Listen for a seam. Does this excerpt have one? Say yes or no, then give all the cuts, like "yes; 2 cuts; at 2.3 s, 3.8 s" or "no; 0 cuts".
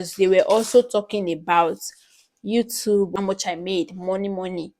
yes; 1 cut; at 3.1 s